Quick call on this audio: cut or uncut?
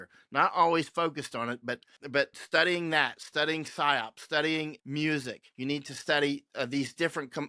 cut